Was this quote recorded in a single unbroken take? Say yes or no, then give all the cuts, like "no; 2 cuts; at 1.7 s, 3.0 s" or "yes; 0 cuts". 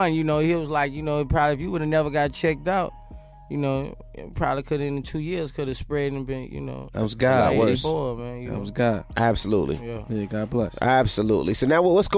yes; 0 cuts